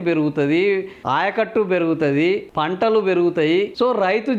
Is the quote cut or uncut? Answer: cut